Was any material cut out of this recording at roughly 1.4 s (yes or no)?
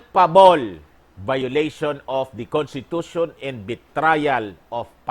yes